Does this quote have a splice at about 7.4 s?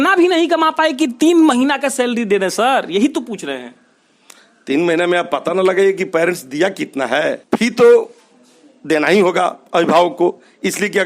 yes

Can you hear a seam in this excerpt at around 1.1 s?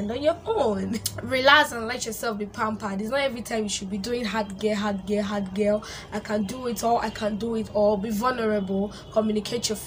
yes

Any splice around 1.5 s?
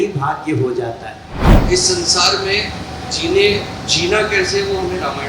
yes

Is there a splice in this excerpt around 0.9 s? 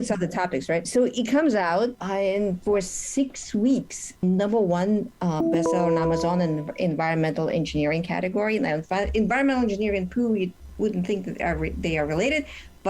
yes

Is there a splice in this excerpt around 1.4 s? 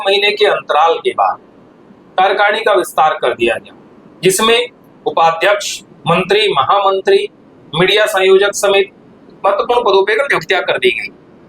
no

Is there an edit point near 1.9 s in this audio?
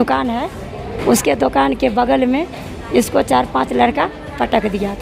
no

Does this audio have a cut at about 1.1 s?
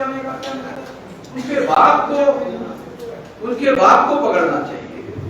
yes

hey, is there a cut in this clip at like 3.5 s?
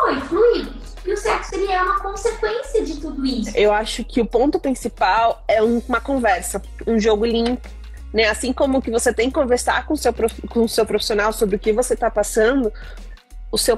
yes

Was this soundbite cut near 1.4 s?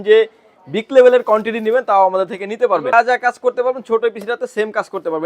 no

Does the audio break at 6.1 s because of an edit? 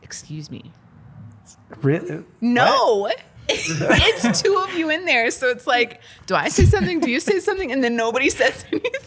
no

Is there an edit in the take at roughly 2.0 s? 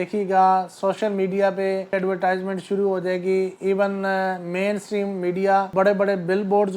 yes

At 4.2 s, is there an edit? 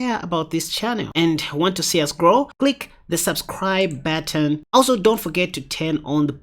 no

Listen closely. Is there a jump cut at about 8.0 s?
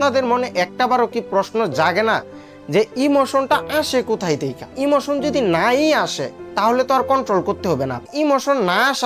yes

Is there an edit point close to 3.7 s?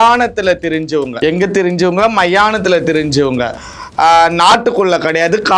no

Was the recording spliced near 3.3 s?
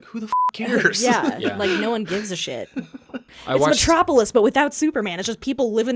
yes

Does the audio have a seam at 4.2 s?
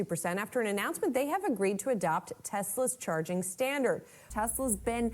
yes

